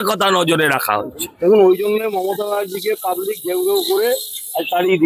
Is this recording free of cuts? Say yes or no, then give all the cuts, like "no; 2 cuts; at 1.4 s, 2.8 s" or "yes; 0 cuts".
no; 1 cut; at 1.3 s